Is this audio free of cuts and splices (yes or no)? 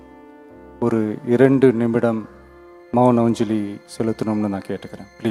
yes